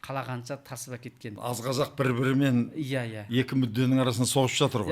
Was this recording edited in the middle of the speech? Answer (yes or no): yes